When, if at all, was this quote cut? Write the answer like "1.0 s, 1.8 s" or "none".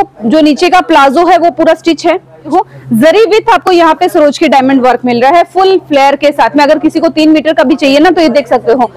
2.5 s